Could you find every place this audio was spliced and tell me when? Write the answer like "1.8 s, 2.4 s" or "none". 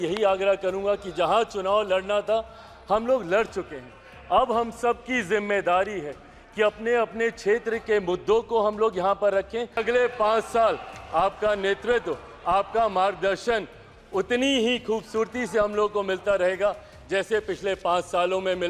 9.8 s